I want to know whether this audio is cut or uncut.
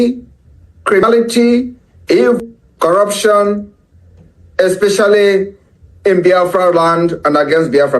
cut